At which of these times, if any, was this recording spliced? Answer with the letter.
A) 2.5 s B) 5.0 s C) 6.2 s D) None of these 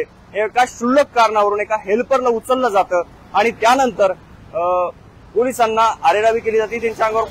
D